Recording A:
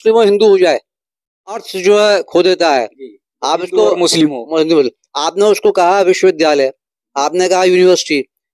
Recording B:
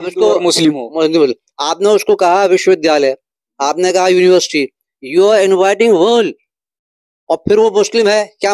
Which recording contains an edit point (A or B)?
A